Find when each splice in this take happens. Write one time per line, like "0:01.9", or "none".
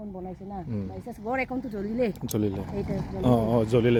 none